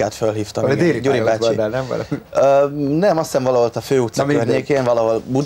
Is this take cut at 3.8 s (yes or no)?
no